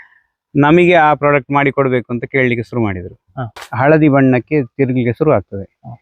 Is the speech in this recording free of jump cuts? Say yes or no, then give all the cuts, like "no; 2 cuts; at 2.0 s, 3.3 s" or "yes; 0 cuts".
no; 1 cut; at 3.6 s